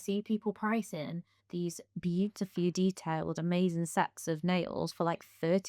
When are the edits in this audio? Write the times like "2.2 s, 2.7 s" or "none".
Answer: none